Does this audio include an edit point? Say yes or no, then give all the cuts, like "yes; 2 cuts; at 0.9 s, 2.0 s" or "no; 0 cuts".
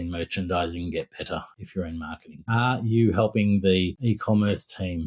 yes; 2 cuts; at 1.8 s, 4.0 s